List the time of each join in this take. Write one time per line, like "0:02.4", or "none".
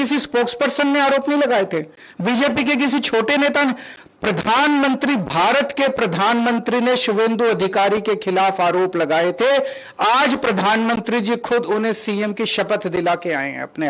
none